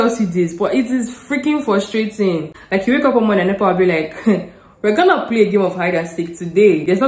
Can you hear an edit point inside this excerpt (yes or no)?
yes